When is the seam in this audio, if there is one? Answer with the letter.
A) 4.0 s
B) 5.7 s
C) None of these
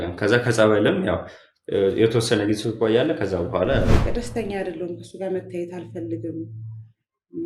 A